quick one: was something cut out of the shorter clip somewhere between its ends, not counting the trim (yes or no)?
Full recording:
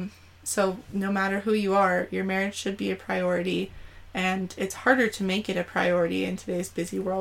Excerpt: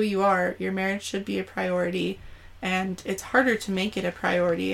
no